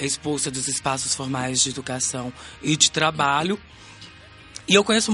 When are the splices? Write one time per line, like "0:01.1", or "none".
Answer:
none